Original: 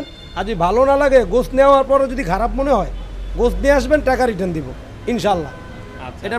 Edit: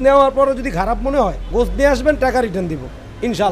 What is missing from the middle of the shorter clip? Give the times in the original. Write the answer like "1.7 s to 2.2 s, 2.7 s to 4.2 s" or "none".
2.9 s to 3.3 s